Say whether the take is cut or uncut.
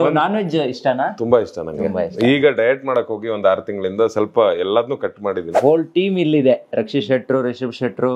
cut